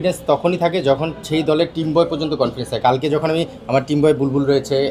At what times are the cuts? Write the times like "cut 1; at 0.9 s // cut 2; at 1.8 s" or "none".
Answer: none

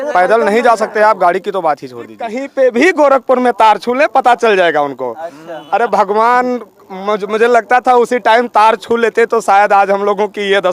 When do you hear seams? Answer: cut 1; at 2.4 s

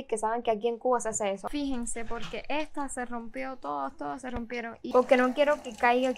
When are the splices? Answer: cut 1; at 1.4 s // cut 2; at 4.8 s

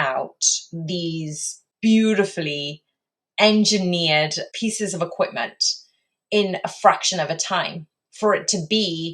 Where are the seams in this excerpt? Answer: cut 1; at 1.7 s // cut 2; at 4.4 s

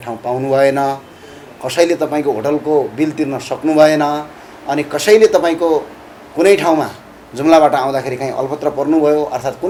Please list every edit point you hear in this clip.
none

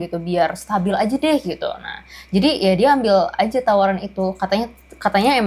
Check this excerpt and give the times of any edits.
none

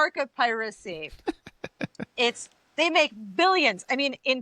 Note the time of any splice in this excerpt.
none

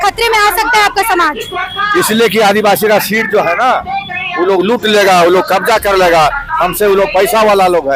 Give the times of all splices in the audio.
none

